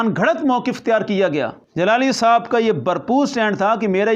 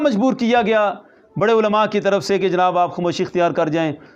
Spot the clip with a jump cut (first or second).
first